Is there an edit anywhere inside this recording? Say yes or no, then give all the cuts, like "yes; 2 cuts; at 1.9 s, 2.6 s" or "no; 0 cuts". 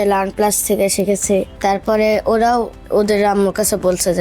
yes; 2 cuts; at 1.5 s, 2.8 s